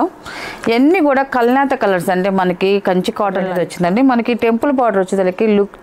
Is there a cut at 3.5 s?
yes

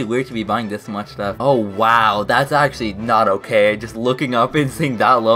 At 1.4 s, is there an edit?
yes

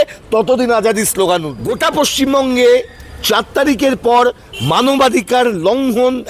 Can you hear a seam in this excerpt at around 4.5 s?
no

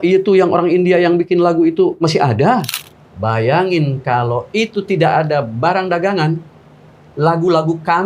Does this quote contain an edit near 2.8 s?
yes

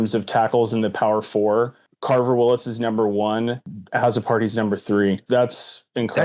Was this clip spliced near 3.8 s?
yes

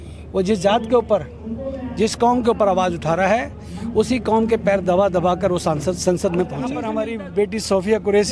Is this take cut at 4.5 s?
no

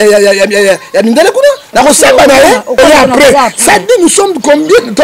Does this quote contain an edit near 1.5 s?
no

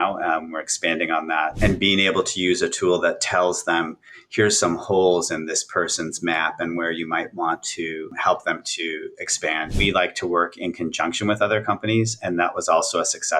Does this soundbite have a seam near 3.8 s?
no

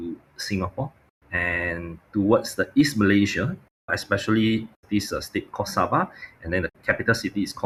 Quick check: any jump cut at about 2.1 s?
no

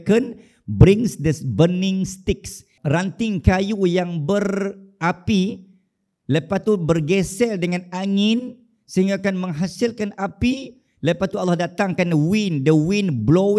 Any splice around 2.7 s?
yes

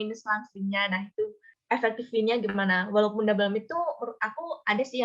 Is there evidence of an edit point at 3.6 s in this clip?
no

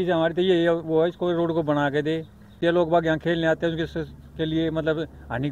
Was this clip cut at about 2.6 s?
yes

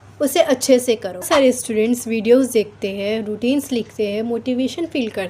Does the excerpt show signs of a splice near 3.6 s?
no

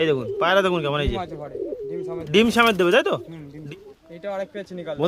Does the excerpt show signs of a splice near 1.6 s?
no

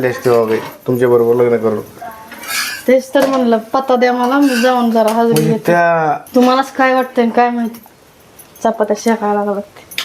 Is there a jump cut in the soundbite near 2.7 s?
no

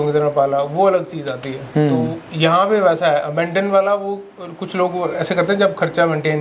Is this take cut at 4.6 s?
no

